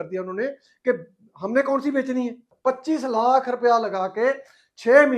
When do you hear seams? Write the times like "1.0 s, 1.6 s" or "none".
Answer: 2.5 s